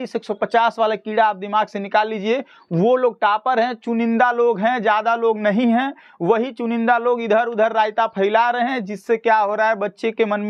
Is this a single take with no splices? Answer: yes; 0 cuts

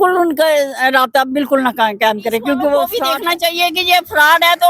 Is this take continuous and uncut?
no; 1 cut; at 3.0 s

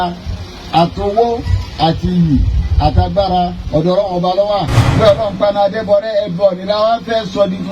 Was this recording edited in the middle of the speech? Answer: yes; 1 cut; at 4.8 s

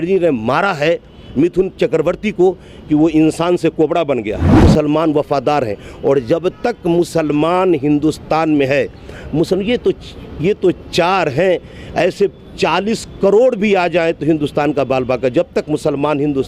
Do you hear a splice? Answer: yes; 1 cut; at 4.6 s

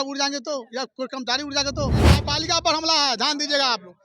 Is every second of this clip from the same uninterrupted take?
no; 1 cut; at 2.2 s

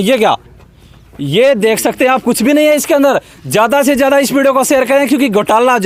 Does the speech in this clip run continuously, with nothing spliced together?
yes; 0 cuts

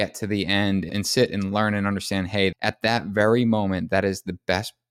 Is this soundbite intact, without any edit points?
no; 2 cuts; at 0.9 s, 2.5 s

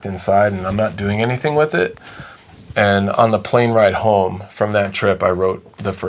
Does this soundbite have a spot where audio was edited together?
no; 0 cuts

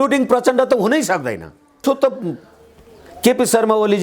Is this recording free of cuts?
no; 1 cut; at 1.8 s

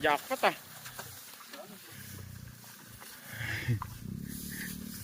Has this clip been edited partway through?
no; 0 cuts

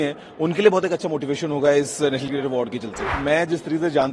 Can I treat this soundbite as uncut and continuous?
no; 1 cut; at 3.1 s

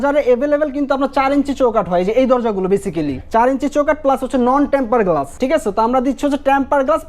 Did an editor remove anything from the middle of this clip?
yes; 2 cuts; at 3.2 s, 5.3 s

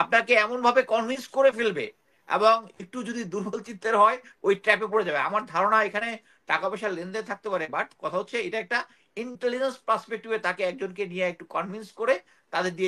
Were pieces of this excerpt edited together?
no; 0 cuts

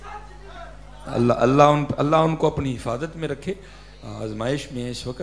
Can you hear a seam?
no; 0 cuts

